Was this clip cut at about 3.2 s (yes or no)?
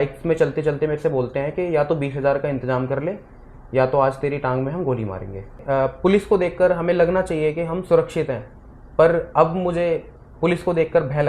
no